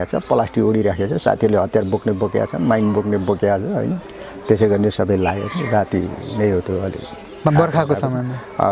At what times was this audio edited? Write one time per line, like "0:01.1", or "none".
none